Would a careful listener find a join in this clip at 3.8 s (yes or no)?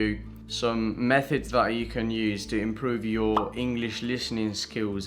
no